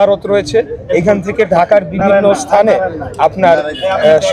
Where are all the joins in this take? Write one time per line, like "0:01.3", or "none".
none